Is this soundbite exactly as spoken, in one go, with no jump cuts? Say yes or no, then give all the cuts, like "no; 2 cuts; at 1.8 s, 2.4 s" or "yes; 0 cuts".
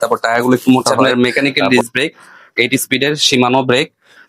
no; 1 cut; at 0.9 s